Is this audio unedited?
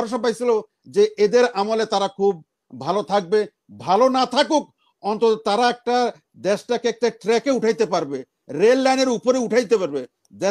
yes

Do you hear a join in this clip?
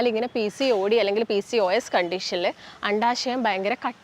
no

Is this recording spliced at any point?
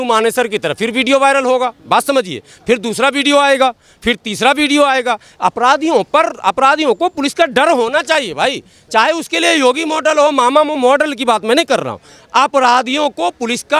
no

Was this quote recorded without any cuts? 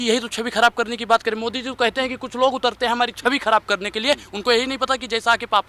yes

